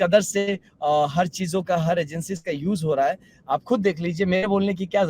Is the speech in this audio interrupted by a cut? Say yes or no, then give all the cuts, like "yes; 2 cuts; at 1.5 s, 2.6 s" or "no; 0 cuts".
no; 0 cuts